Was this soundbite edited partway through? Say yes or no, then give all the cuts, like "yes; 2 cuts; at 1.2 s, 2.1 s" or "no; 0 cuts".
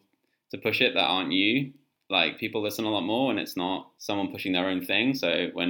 yes; 1 cut; at 3.9 s